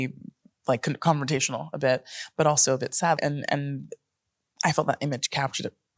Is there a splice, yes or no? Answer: yes